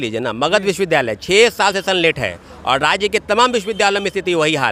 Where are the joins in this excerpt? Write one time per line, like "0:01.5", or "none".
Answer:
none